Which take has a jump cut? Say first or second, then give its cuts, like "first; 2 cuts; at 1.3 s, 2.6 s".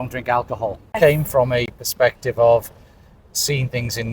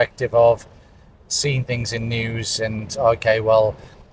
first; 1 cut; at 1.0 s